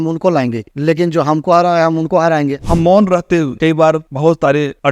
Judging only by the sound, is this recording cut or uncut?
cut